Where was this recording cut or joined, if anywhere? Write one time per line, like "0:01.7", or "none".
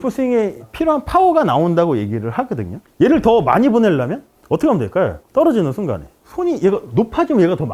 0:02.8